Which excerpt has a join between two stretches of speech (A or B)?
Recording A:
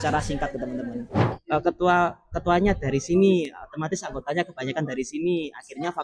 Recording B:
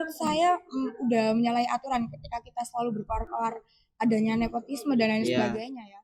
A